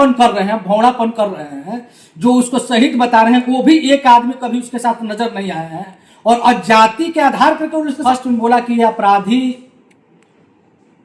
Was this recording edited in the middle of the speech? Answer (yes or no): yes